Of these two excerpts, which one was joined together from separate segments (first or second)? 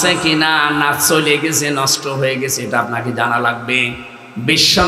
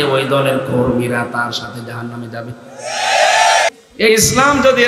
second